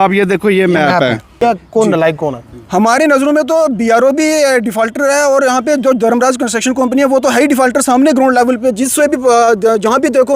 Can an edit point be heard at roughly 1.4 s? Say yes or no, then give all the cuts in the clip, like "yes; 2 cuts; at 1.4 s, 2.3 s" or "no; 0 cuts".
yes; 1 cut; at 1.4 s